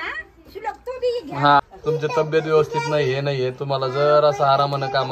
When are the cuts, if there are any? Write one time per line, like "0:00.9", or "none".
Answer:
0:01.6